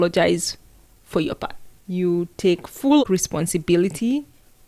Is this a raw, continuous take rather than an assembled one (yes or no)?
no